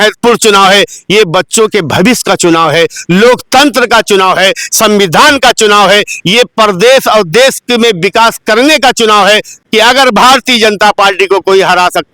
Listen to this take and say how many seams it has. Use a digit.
1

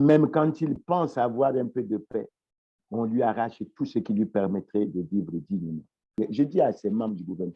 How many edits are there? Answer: 1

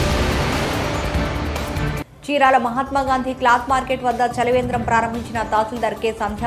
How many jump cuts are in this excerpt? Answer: 1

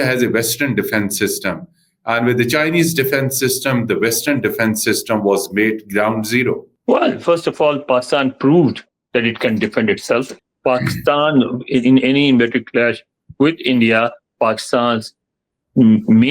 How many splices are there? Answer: 2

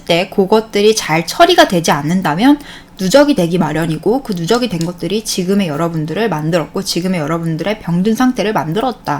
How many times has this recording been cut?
0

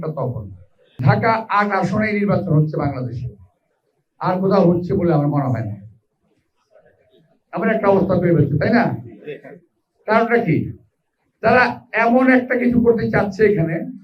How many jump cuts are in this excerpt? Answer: 1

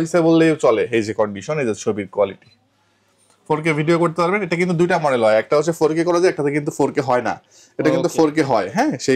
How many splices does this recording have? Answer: 0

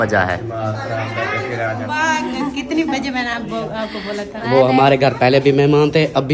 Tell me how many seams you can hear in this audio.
1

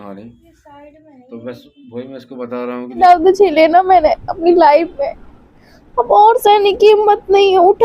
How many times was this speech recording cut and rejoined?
1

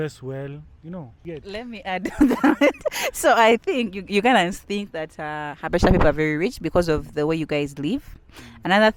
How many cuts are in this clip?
1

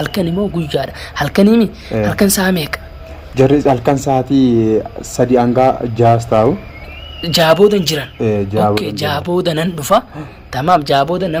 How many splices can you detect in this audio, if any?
0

